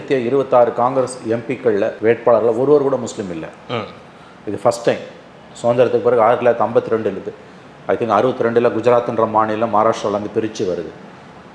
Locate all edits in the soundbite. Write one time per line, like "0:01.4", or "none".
none